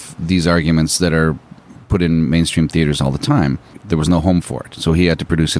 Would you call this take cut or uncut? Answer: cut